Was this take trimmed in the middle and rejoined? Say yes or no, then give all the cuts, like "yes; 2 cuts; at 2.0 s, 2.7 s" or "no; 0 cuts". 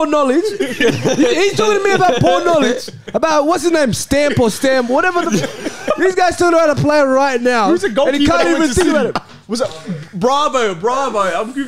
no; 0 cuts